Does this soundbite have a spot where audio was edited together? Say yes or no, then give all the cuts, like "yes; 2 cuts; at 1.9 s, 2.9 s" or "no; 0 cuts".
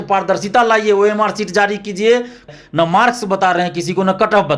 yes; 1 cut; at 2.5 s